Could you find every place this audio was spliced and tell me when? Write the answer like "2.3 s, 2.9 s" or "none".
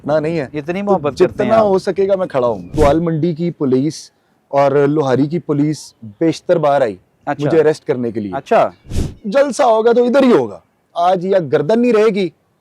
2.7 s, 8.9 s